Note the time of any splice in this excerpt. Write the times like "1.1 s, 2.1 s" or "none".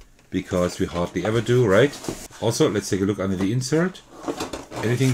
2.3 s